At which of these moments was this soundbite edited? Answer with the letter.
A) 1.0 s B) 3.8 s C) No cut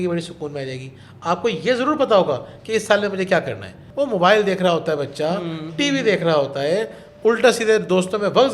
B